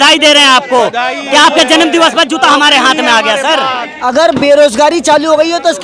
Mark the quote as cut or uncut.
cut